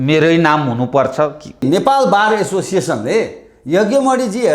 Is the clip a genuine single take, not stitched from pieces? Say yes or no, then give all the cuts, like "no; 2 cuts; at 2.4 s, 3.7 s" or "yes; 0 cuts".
no; 1 cut; at 1.6 s